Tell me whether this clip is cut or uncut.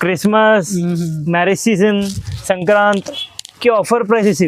uncut